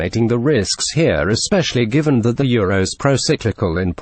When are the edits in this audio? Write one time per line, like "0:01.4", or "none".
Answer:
none